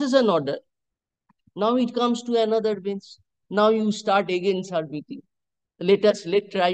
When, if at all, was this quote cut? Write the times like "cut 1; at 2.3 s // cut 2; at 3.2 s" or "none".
none